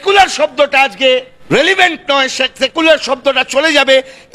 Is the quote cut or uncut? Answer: cut